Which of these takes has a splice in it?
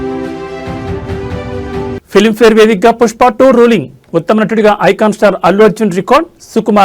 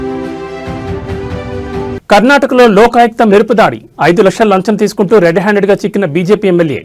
second; 1 cut; at 1.8 s

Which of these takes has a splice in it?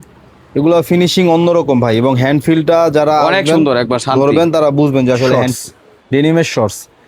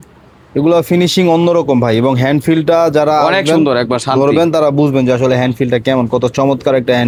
first; 1 cut; at 5.3 s

